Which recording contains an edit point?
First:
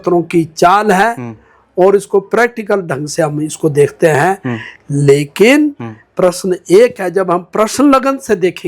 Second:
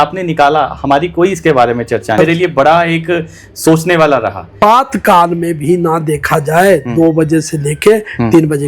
second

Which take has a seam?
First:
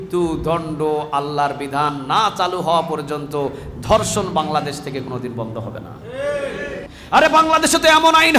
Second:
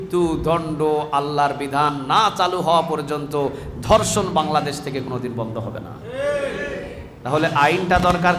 first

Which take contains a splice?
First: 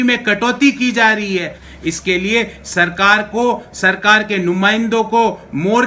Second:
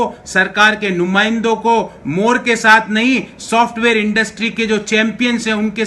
first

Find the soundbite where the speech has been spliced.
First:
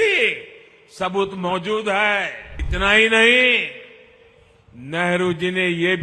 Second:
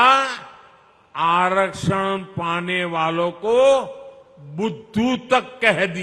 first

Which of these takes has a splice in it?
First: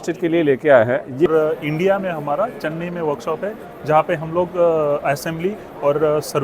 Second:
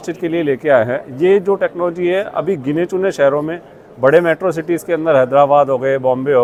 first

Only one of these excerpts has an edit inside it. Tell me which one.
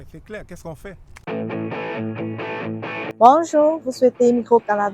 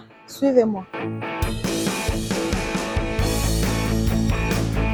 first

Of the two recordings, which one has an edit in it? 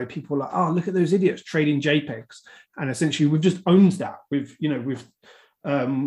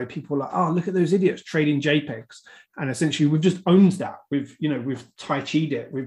second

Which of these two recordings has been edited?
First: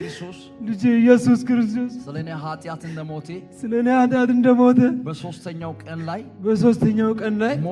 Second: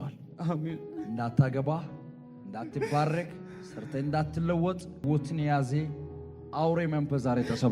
second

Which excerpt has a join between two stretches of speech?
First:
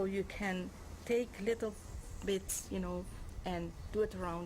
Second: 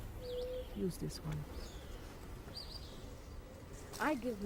first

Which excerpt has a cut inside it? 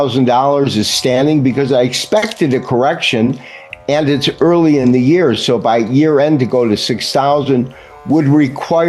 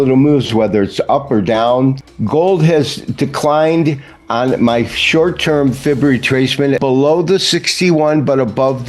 second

